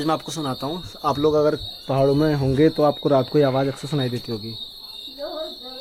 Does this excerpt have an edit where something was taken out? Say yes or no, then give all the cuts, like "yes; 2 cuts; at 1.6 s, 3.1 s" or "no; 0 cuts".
no; 0 cuts